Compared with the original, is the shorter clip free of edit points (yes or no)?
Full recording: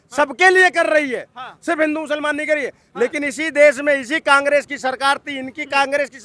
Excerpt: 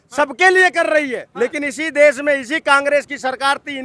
no